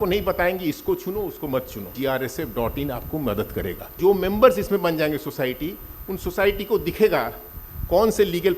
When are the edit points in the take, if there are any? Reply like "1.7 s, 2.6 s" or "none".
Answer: 1.9 s, 4.0 s